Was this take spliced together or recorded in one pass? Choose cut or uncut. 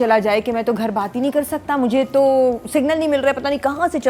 uncut